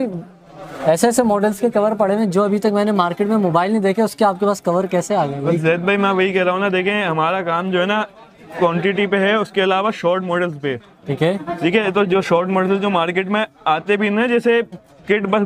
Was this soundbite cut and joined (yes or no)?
no